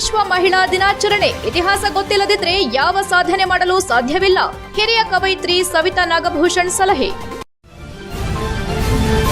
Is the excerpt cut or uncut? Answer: cut